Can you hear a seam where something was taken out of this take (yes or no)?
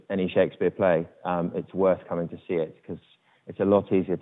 no